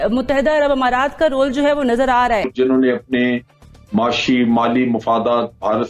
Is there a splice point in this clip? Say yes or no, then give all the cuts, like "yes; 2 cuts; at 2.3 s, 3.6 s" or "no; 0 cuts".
yes; 1 cut; at 2.5 s